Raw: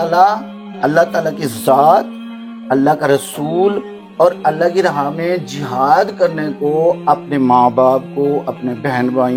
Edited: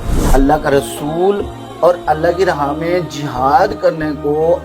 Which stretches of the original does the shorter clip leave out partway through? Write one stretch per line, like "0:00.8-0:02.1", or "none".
none